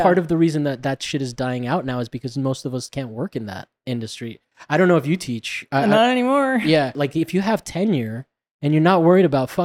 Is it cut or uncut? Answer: cut